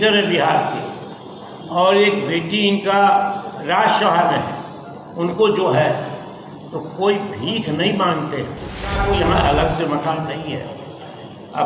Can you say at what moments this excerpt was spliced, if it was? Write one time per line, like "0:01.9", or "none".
0:09.0